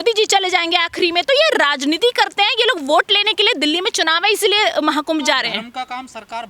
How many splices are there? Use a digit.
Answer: 0